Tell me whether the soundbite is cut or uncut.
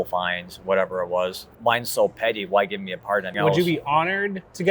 cut